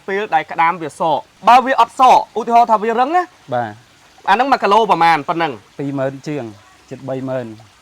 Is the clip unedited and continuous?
no; 2 cuts; at 1.3 s, 5.7 s

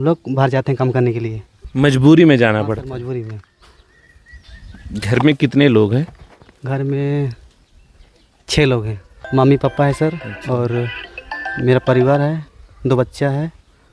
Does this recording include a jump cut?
no; 0 cuts

